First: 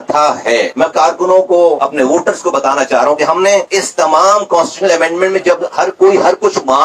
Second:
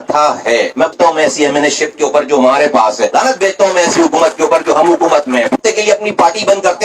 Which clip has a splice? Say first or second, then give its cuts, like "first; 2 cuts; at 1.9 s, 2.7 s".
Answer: second; 2 cuts; at 0.9 s, 5.6 s